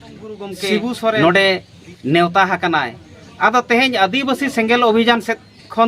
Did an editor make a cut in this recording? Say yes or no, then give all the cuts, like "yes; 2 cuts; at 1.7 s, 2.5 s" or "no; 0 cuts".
yes; 1 cut; at 1.2 s